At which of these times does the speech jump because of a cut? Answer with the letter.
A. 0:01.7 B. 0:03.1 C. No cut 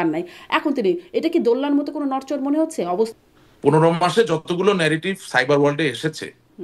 B